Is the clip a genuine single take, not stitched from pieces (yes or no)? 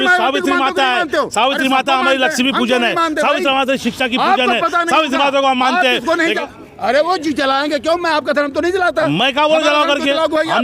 no